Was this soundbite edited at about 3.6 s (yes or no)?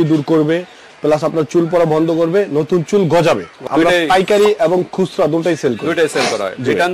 yes